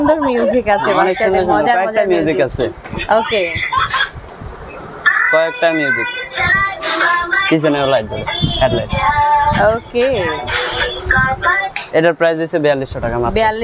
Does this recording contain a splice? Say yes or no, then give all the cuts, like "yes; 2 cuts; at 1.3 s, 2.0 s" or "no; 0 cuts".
no; 0 cuts